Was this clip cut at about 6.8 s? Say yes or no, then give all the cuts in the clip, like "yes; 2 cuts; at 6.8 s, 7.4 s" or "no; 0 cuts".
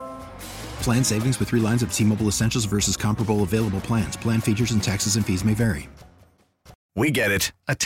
yes; 1 cut; at 6.8 s